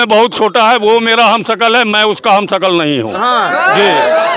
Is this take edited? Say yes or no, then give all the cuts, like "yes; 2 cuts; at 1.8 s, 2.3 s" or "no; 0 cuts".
no; 0 cuts